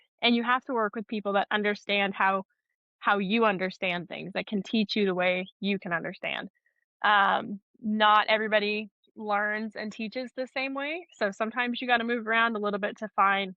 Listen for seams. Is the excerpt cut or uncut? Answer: uncut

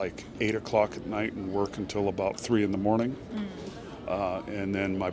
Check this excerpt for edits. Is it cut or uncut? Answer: uncut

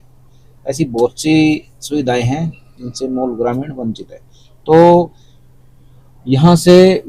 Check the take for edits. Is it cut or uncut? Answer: uncut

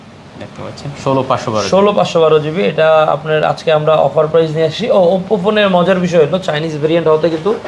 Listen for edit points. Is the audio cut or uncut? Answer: uncut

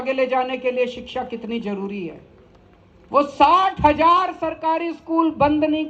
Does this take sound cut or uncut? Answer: uncut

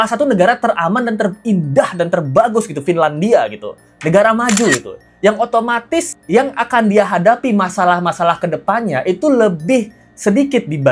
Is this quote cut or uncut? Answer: uncut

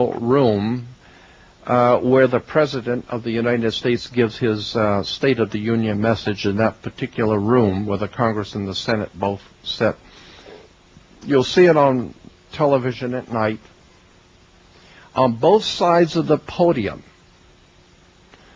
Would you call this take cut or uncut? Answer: uncut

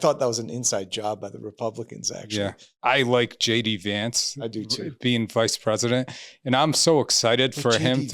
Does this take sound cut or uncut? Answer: cut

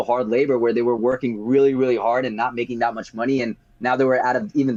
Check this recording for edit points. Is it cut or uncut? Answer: uncut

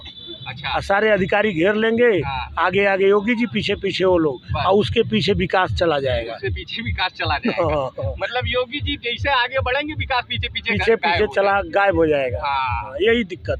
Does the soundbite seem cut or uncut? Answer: uncut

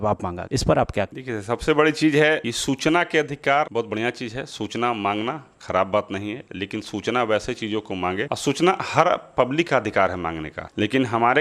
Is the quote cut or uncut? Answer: uncut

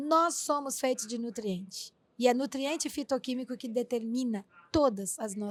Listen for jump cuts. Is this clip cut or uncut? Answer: uncut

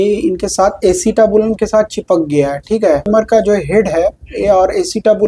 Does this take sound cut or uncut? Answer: cut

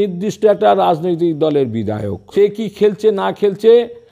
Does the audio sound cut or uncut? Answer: cut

